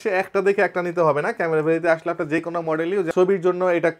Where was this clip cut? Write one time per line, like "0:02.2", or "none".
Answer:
0:03.1

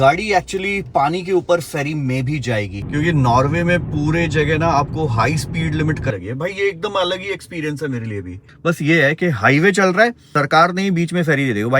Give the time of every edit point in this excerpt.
0:02.8
0:06.1
0:08.4
0:10.2

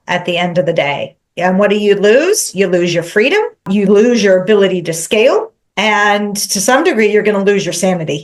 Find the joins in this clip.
0:03.7
0:05.6

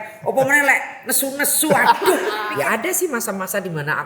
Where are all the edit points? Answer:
0:02.4

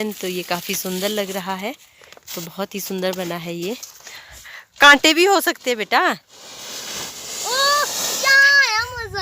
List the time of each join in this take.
0:04.0

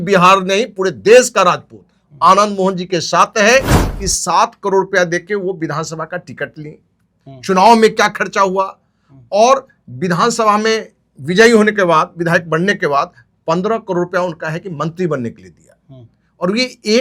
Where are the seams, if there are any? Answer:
0:03.8

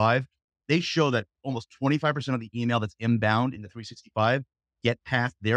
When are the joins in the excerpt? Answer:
none

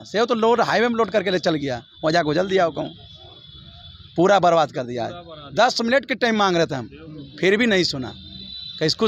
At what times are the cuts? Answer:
none

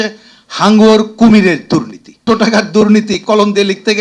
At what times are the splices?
0:02.2

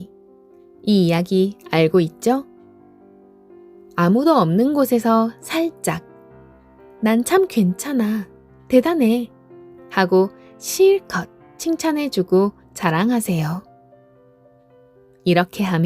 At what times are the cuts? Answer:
none

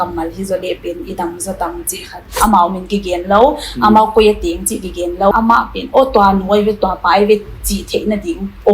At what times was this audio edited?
0:02.4
0:05.3

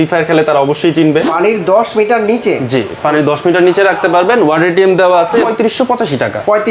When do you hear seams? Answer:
0:01.3
0:05.4

